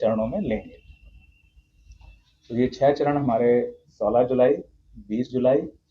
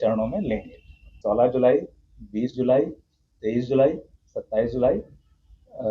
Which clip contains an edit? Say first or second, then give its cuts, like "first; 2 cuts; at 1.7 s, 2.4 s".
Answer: second; 1 cut; at 1.1 s